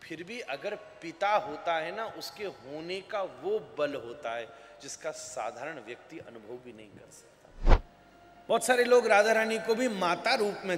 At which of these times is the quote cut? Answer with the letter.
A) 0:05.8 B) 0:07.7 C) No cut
B